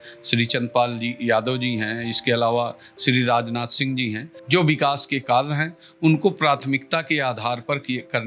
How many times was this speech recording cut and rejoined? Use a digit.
1